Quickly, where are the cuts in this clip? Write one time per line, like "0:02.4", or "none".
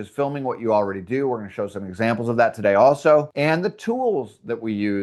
none